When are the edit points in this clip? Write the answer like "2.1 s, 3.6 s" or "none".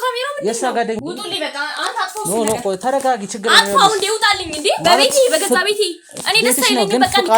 1.0 s